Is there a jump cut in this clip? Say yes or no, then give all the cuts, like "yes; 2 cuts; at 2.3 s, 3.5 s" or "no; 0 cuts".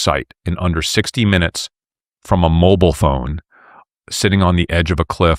no; 0 cuts